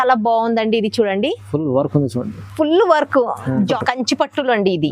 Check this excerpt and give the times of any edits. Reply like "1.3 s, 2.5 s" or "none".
3.7 s